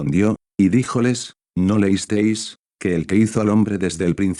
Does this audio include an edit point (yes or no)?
no